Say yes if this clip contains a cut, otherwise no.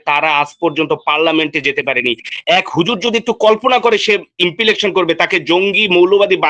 no